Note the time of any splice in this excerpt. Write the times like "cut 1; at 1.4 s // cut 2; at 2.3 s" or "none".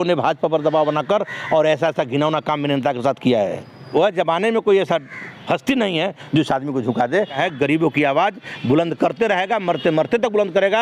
cut 1; at 3.9 s // cut 2; at 7.3 s

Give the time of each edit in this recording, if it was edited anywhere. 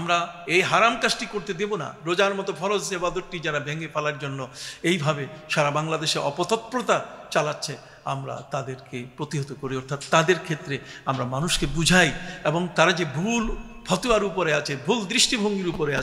none

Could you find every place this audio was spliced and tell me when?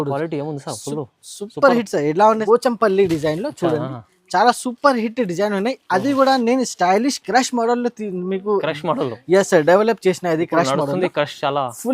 cut 1; at 2.4 s

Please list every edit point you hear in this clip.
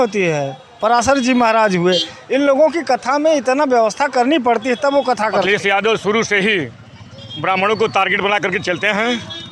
cut 1; at 5.5 s

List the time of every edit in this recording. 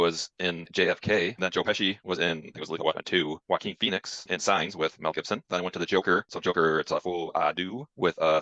none

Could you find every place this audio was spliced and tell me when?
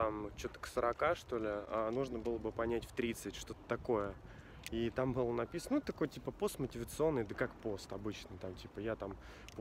none

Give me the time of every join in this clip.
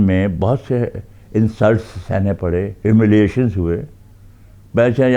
none

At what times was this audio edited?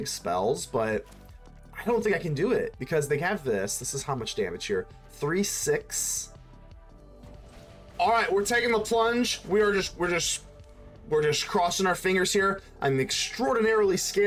none

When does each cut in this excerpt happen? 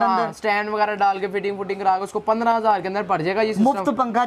none

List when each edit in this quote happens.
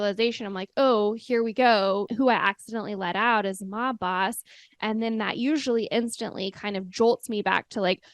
cut 1; at 2.1 s

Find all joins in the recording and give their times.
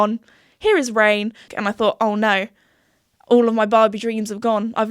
cut 1; at 1.4 s

